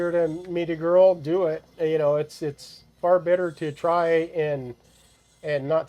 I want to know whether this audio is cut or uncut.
uncut